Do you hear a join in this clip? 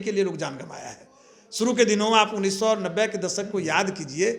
no; 0 cuts

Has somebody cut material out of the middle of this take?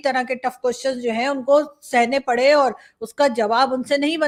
no; 0 cuts

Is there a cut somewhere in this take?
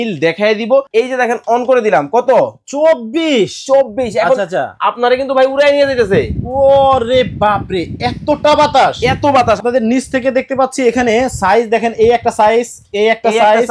yes; 2 cuts; at 0.9 s, 9.6 s

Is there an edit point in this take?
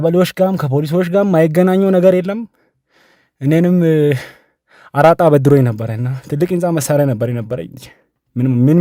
no; 0 cuts

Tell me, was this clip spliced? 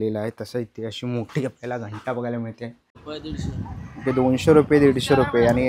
yes; 1 cut; at 3.0 s

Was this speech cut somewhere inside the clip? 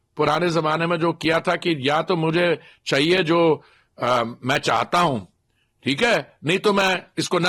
no; 0 cuts

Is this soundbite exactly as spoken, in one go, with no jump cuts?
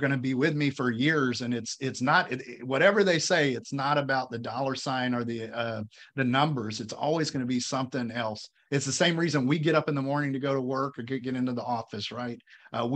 yes; 0 cuts

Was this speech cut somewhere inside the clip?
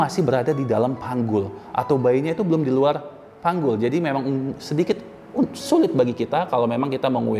no; 0 cuts

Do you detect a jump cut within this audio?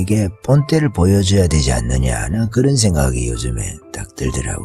no; 0 cuts

